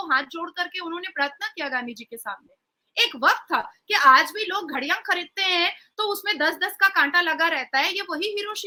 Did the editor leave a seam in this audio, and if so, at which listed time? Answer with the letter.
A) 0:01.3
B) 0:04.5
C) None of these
C